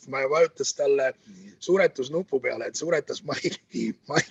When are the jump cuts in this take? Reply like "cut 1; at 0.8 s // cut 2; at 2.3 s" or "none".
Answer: none